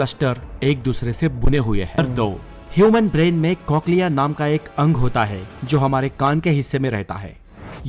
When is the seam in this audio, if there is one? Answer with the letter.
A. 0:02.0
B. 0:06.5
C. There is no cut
A